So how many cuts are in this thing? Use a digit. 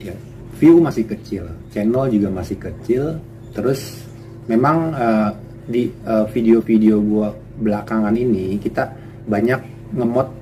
0